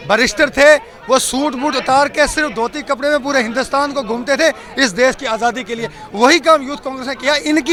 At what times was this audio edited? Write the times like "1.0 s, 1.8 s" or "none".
none